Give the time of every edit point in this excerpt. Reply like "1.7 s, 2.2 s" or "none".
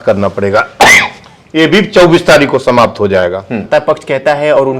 3.6 s